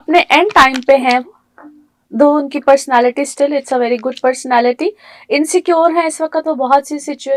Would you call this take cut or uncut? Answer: uncut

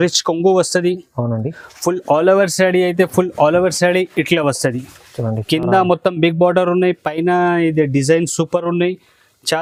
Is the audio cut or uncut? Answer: uncut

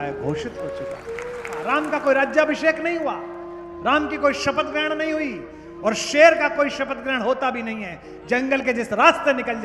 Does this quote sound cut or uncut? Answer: cut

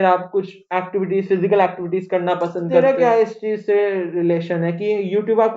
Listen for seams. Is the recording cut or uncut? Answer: cut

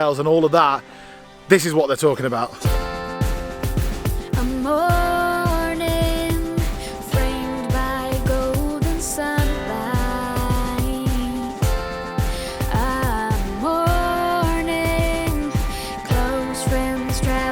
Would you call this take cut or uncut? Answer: uncut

